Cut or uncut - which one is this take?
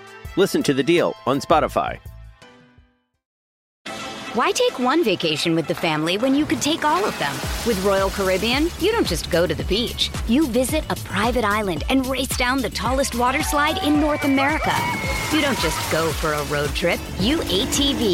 cut